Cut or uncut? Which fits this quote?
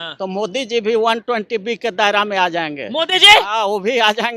uncut